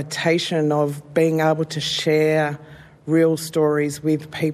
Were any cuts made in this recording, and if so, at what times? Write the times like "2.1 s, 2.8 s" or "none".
none